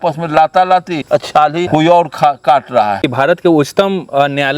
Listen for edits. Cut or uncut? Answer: cut